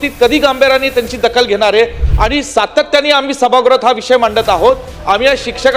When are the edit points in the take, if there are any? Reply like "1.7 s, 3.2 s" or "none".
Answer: none